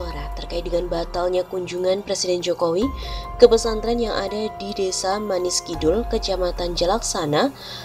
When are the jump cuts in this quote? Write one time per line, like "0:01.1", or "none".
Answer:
none